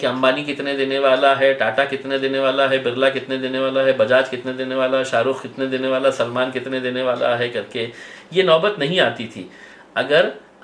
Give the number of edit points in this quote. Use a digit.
0